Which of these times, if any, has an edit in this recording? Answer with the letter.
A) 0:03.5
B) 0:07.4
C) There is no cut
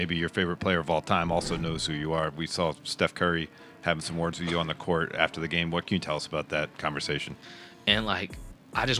B